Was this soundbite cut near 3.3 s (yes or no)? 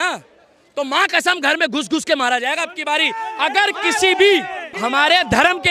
no